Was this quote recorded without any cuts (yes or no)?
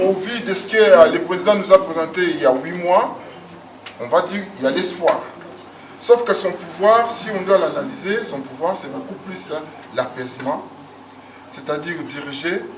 yes